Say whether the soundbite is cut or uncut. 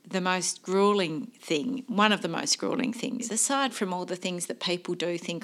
cut